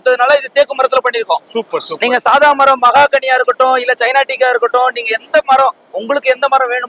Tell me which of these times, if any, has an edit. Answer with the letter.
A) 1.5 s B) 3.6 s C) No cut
C